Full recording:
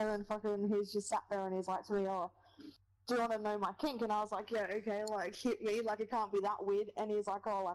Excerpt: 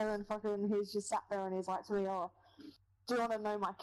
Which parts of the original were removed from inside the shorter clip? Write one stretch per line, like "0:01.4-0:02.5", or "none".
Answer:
none